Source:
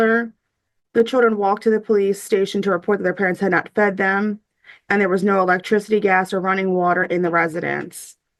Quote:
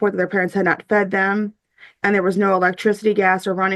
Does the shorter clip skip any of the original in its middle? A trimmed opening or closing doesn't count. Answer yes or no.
no